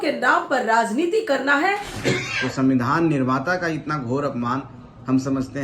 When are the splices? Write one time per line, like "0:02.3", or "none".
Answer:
0:01.9